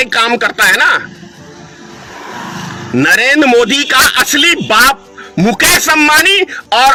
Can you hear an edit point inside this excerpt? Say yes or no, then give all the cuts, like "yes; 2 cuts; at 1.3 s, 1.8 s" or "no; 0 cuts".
no; 0 cuts